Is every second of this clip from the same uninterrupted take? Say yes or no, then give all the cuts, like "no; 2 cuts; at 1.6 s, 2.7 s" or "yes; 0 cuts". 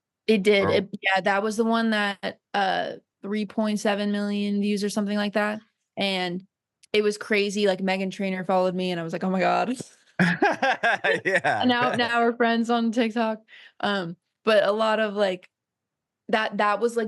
no; 1 cut; at 3.1 s